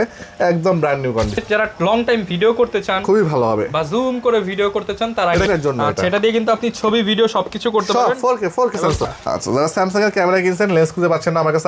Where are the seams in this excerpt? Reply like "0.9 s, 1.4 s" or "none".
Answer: 1.4 s, 5.5 s, 9.0 s

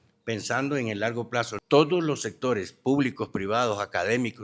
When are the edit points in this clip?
1.5 s

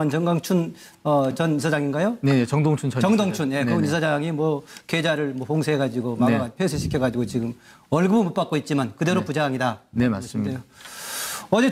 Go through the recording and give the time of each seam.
4.3 s

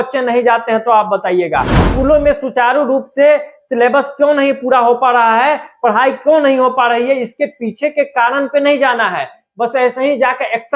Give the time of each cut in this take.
1.8 s

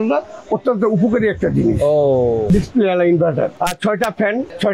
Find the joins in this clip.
2.5 s, 3.5 s

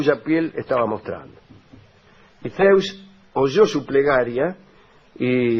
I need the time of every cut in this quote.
none

